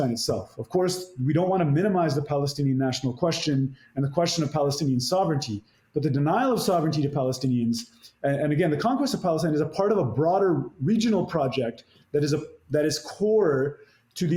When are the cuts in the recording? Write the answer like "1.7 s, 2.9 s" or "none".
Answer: none